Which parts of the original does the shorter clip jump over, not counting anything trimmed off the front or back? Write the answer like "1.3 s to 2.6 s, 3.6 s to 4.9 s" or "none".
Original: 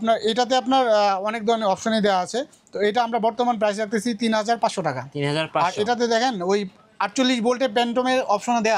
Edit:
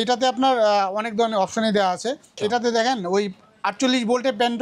2.7 s to 5.7 s